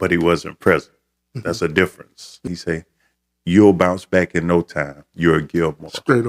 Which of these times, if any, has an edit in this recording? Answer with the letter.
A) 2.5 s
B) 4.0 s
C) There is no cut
A